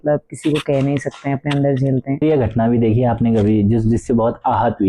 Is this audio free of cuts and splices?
no; 1 cut; at 2.2 s

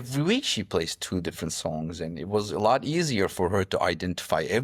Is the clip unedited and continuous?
yes; 0 cuts

